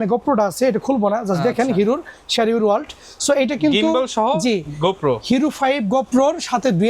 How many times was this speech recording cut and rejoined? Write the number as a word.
zero